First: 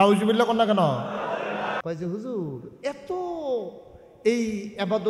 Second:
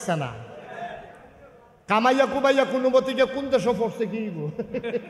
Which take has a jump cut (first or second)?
first